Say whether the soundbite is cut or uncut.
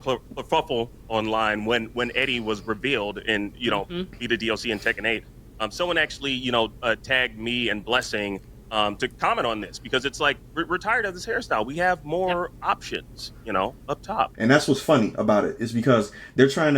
cut